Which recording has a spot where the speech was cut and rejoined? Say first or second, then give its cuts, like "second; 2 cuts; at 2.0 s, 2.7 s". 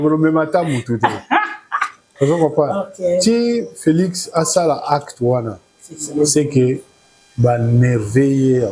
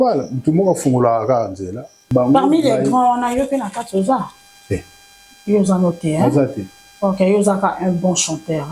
second; 1 cut; at 2.1 s